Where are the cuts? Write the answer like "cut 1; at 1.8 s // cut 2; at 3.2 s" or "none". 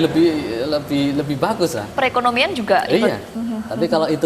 cut 1; at 3.3 s